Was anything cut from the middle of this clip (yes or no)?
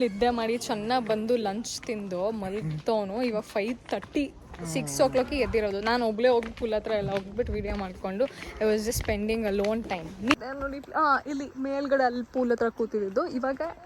yes